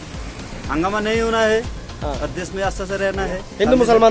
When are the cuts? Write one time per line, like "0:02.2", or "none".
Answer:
none